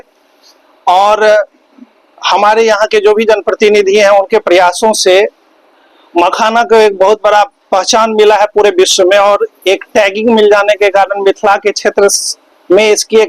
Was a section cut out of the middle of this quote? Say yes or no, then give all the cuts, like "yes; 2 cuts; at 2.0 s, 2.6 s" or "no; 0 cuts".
no; 0 cuts